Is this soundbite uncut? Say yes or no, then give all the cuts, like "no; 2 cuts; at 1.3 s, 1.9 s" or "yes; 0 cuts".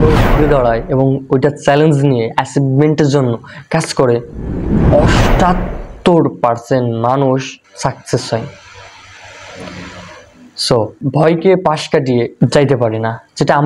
no; 3 cuts; at 7.6 s, 11.0 s, 12.3 s